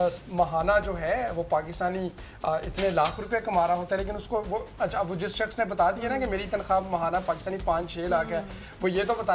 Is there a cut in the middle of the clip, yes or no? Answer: no